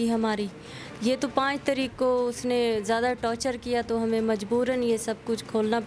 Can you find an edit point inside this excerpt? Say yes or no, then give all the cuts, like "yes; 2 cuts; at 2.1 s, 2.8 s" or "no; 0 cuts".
no; 0 cuts